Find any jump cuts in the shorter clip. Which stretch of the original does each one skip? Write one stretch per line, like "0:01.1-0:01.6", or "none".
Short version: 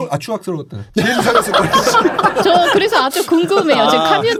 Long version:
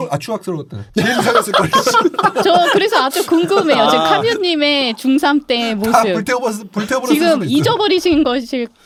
none